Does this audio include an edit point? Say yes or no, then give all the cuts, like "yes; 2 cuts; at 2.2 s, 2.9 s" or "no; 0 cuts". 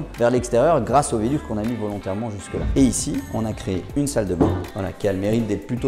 yes; 1 cut; at 2.7 s